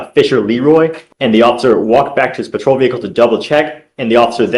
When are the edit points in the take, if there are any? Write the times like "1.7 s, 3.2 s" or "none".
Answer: 1.0 s